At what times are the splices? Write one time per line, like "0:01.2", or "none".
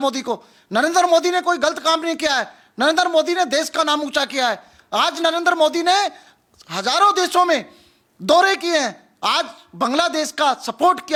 none